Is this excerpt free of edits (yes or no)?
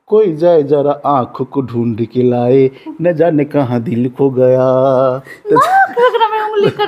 yes